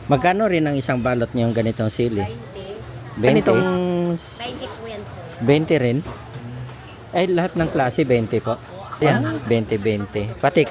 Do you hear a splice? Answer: yes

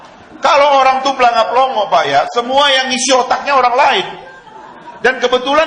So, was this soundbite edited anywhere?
no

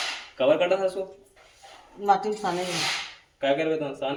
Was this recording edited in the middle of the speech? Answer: no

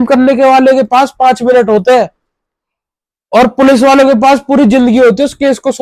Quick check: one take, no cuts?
yes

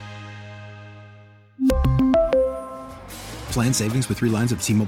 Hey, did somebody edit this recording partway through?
no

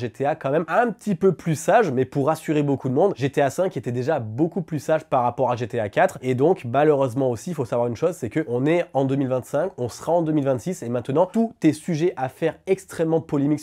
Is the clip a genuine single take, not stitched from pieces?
yes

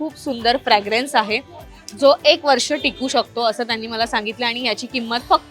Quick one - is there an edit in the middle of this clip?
no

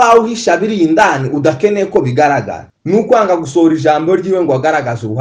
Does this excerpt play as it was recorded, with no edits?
no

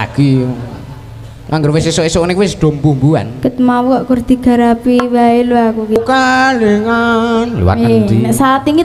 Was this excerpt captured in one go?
no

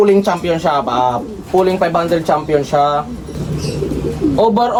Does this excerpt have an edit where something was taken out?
no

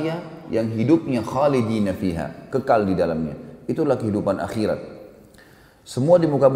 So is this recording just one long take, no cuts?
yes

